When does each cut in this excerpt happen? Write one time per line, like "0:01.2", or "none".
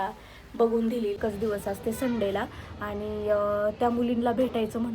0:01.2